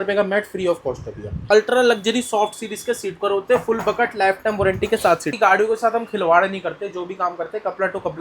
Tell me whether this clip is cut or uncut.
cut